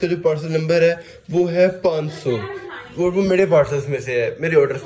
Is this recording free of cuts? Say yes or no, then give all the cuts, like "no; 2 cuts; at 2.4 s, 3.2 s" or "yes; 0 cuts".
yes; 0 cuts